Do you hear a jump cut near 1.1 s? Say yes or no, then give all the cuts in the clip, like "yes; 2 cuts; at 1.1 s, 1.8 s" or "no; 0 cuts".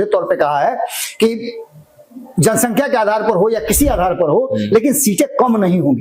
no; 0 cuts